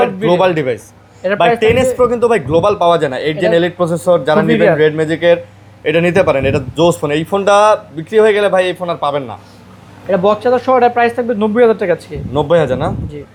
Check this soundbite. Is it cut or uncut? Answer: uncut